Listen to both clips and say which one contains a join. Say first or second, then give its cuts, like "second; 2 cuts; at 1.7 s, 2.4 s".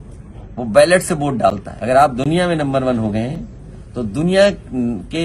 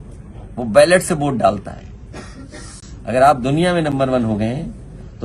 first; 1 cut; at 1.7 s